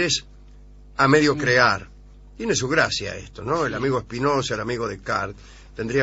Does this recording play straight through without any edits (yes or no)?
no